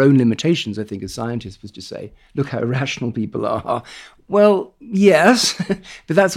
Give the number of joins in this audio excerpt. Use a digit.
1